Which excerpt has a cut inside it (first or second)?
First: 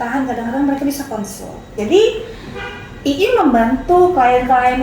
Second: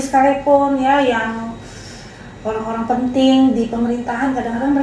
first